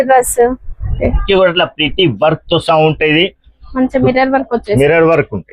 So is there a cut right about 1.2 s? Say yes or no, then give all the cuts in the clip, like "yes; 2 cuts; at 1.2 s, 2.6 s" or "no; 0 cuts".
yes; 1 cut; at 1.2 s